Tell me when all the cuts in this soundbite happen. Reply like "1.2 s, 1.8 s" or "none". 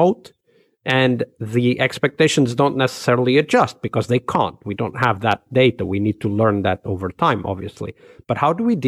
none